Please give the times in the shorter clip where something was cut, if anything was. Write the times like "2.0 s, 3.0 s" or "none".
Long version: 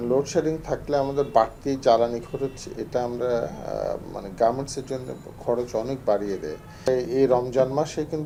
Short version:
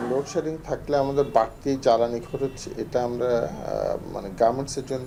none